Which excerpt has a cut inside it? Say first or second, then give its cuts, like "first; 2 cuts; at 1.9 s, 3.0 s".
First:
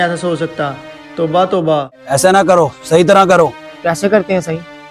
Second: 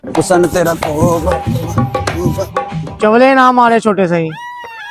first; 2 cuts; at 1.9 s, 3.7 s